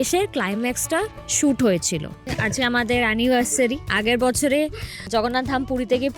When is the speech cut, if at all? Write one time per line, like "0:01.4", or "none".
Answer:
0:02.3